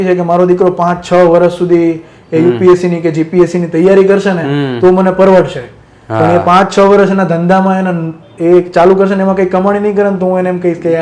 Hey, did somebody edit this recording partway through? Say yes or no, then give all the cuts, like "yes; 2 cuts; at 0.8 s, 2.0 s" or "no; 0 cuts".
no; 0 cuts